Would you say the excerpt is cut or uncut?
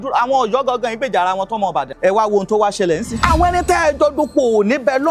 cut